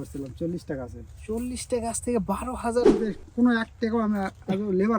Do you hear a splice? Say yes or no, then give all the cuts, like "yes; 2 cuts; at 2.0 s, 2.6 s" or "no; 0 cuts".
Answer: yes; 1 cut; at 3.0 s